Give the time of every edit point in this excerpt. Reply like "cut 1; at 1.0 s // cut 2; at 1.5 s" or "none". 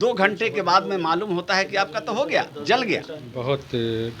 cut 1; at 3.3 s